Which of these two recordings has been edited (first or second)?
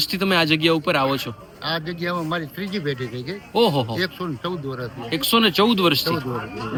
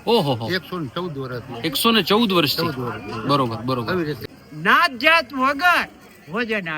second